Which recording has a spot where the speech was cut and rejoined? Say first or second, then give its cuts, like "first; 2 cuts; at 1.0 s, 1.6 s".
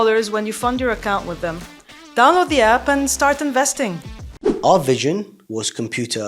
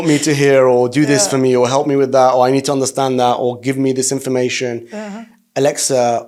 first; 2 cuts; at 4.6 s, 5.4 s